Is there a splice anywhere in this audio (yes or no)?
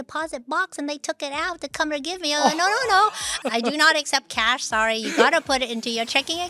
yes